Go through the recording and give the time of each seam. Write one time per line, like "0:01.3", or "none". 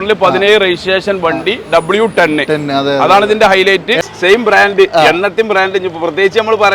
0:04.0